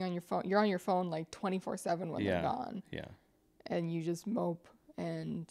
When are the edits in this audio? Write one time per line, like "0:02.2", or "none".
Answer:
none